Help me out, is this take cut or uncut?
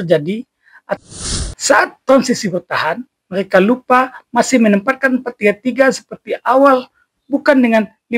cut